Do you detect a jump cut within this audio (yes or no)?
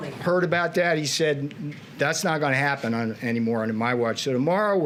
no